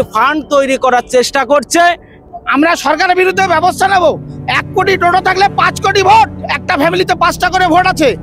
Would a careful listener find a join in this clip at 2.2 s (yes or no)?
yes